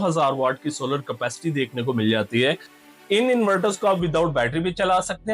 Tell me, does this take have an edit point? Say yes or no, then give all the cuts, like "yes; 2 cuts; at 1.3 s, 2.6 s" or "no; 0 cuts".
yes; 1 cut; at 2.8 s